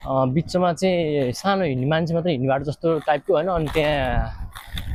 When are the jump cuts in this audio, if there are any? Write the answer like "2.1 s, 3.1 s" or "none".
none